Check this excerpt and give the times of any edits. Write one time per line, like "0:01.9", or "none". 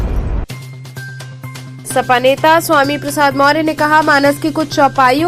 0:01.7